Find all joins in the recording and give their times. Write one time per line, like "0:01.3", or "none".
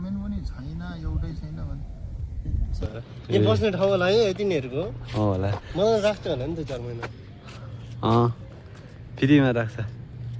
0:02.8